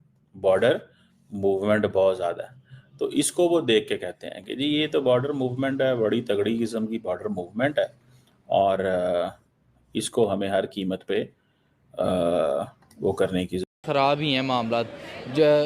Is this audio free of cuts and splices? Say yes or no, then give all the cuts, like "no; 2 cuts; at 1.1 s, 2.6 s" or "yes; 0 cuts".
no; 1 cut; at 13.6 s